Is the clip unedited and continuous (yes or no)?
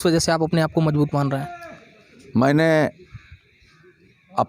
yes